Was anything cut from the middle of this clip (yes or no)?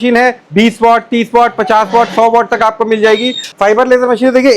yes